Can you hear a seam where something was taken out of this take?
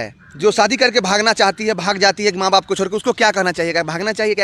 no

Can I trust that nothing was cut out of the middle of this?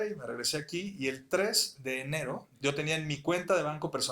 yes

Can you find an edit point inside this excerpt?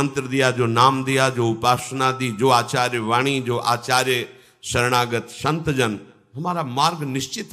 no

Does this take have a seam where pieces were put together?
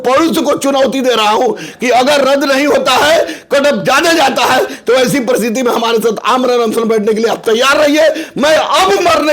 no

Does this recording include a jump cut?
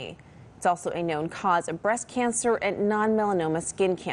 no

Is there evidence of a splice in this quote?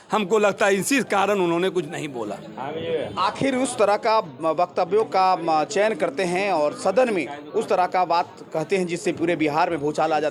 no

